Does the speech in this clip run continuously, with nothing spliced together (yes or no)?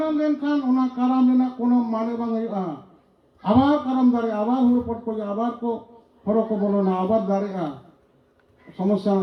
yes